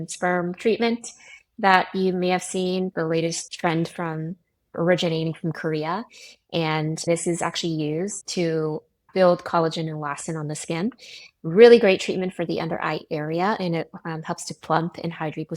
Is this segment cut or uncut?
cut